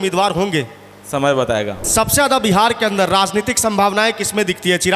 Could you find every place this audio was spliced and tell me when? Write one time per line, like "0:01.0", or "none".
0:01.8